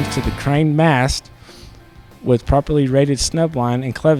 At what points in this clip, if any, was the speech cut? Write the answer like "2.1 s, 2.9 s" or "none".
none